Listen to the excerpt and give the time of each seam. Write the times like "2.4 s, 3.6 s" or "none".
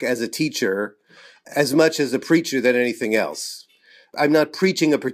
4.1 s